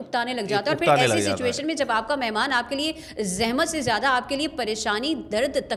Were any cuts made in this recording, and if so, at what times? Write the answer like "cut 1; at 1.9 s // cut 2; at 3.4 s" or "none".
none